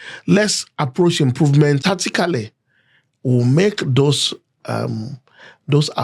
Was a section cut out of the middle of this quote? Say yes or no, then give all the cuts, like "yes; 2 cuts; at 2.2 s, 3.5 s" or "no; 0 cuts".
yes; 1 cut; at 1.8 s